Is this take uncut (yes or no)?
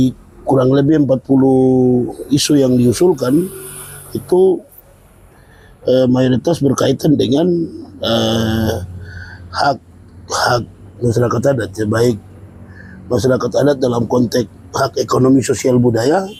yes